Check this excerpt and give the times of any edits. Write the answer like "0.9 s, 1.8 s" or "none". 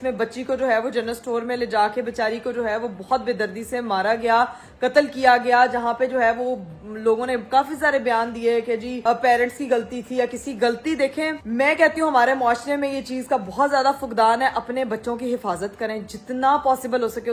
none